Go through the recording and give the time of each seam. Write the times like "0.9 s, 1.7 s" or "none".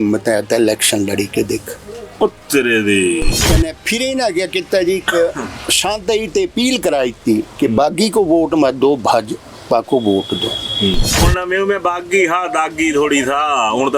3.4 s, 11.2 s